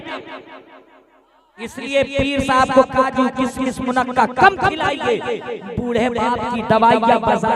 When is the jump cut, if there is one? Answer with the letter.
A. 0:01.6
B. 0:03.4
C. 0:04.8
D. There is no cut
A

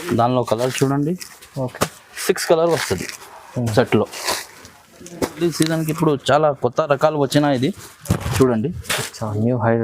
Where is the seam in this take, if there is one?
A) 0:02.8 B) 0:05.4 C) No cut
B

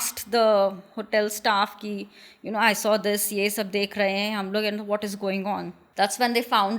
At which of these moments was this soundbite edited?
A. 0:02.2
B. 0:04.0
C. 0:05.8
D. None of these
C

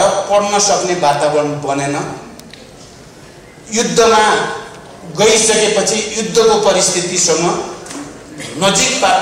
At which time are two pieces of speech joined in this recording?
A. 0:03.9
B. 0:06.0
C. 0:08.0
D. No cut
D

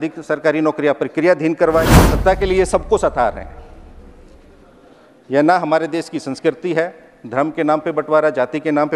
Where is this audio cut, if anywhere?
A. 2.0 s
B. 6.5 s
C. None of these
A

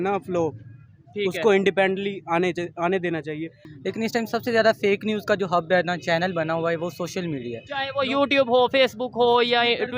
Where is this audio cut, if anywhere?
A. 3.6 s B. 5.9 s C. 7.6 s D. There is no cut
A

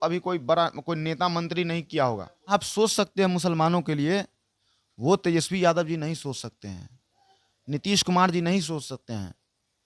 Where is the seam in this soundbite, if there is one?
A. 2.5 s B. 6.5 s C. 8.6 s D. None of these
A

